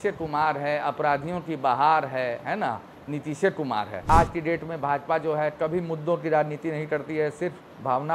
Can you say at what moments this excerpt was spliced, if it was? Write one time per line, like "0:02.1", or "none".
0:04.0